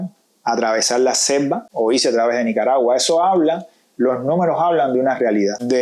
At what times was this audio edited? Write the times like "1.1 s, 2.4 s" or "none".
1.6 s